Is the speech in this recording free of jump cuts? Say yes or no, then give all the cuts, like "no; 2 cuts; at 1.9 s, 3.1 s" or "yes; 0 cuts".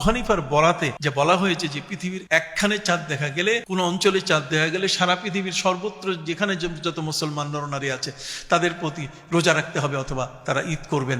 no; 3 cuts; at 1.0 s, 2.2 s, 3.6 s